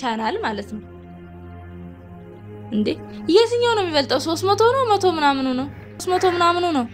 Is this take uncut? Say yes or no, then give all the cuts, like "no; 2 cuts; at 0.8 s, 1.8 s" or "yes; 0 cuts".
no; 3 cuts; at 1.0 s, 2.7 s, 6.0 s